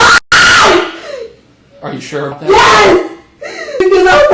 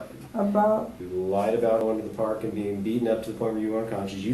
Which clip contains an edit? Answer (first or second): second